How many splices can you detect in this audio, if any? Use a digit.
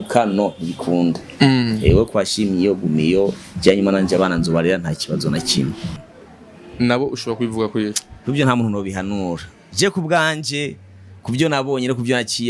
1